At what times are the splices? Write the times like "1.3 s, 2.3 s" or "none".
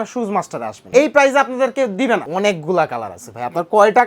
0.8 s, 2.3 s